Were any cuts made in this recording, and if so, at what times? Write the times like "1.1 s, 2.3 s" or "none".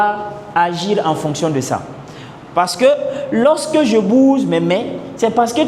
none